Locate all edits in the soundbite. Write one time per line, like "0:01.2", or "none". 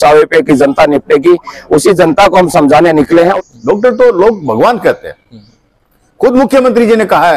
0:03.4